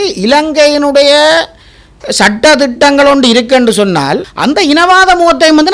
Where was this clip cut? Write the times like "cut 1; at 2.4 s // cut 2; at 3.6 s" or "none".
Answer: cut 1; at 4.3 s